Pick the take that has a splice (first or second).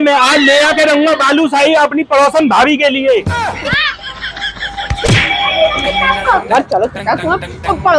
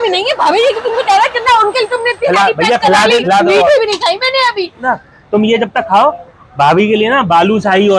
second